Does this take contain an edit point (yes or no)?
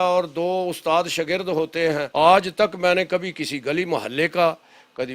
yes